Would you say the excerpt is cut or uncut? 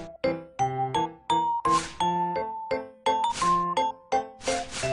uncut